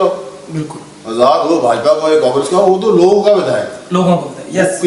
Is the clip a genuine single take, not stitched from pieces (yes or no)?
yes